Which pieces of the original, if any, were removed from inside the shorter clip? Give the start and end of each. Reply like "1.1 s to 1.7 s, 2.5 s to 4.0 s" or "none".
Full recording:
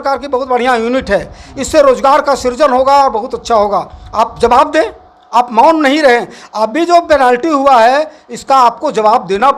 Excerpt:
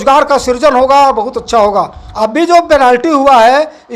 4.0 s to 6.4 s